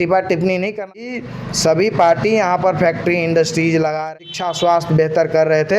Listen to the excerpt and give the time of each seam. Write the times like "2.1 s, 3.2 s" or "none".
1.1 s, 4.0 s